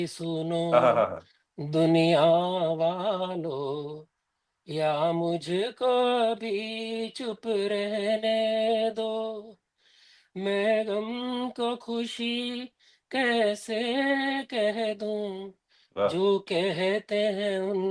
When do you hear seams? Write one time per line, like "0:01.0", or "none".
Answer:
none